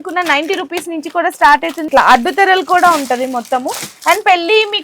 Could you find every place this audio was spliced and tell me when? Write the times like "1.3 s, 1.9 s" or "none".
1.8 s